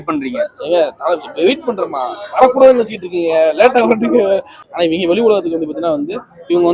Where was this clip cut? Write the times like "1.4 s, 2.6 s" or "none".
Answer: 4.6 s

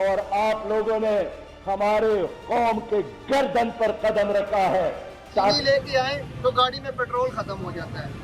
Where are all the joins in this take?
5.6 s

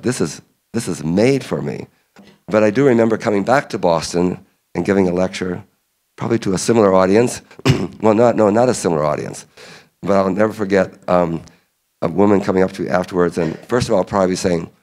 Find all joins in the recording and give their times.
2.2 s

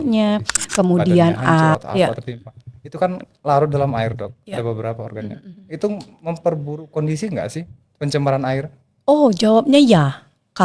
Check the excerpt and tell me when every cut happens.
1.8 s

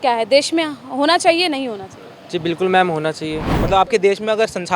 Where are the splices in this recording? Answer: 3.6 s

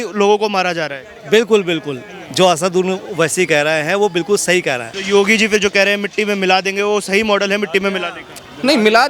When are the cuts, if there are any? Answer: 4.9 s

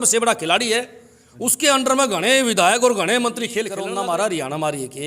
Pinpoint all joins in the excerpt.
3.8 s

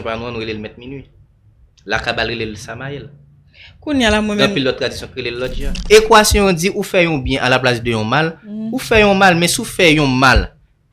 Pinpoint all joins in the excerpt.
5.7 s

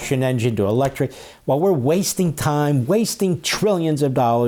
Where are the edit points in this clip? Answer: none

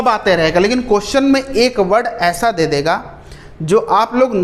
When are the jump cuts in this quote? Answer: none

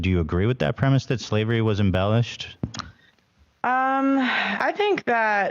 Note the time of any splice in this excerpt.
2.4 s, 4.5 s

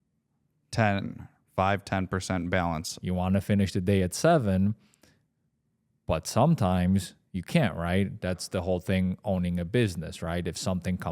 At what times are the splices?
2.9 s

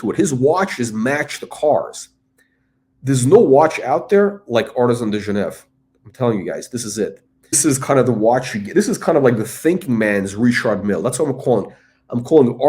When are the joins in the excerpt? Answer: 7.6 s

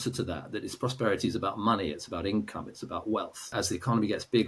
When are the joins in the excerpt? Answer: 3.5 s

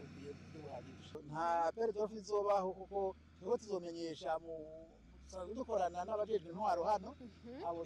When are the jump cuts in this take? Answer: 1.2 s

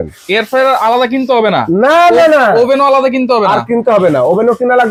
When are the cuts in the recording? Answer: none

